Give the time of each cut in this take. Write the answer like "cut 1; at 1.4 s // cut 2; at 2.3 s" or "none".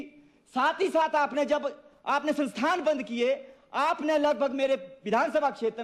none